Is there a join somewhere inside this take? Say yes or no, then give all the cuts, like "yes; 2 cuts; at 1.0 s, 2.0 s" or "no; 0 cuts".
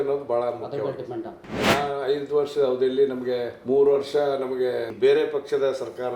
yes; 3 cuts; at 1.6 s, 3.5 s, 4.9 s